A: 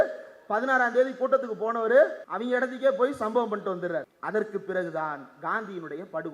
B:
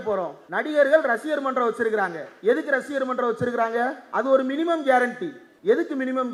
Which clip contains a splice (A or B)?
A